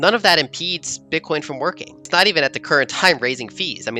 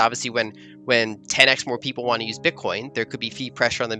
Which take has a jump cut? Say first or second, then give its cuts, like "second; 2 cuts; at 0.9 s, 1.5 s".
first; 1 cut; at 2.1 s